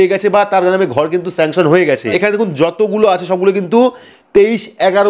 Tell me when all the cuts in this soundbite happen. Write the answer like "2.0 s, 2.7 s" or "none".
2.1 s

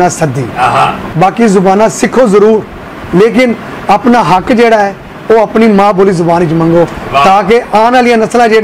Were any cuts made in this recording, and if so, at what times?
1.0 s

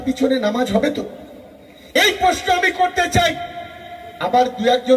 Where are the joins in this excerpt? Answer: none

